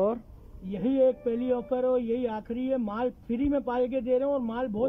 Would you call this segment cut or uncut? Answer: uncut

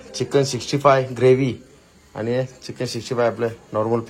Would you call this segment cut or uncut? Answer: uncut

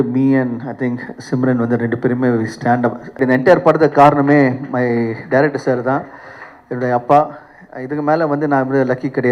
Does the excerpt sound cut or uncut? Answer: cut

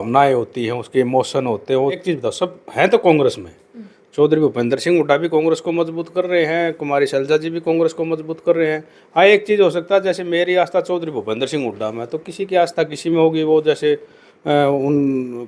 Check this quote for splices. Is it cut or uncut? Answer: cut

